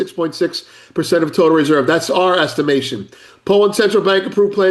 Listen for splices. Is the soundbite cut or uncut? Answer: uncut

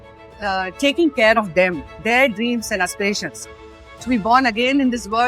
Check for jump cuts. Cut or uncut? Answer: cut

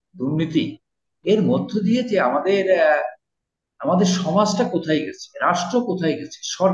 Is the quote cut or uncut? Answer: uncut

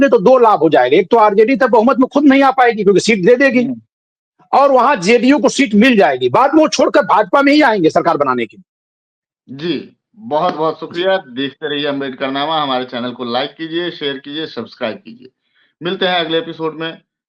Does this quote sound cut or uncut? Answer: uncut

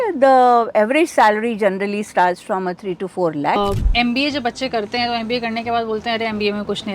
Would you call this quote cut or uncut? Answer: cut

